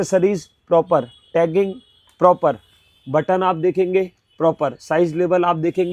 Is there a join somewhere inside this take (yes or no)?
no